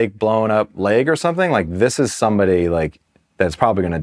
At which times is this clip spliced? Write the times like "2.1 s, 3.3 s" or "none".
none